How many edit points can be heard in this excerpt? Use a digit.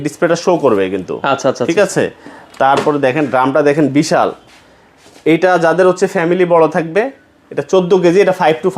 0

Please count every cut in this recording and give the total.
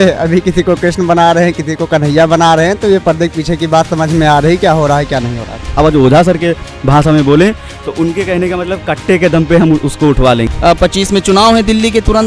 2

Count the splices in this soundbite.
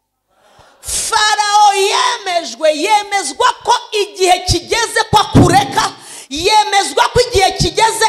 0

